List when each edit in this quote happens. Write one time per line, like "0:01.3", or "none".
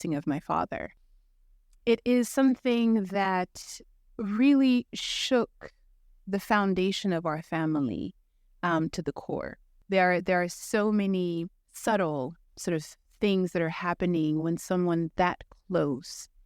0:01.0
0:09.8